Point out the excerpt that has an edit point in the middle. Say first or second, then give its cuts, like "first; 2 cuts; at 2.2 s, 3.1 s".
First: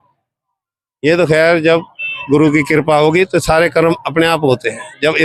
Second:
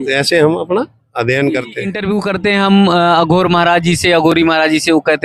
second; 1 cut; at 1.9 s